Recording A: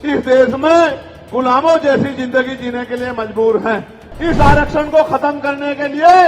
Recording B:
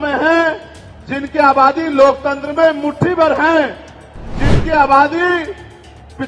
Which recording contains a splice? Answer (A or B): A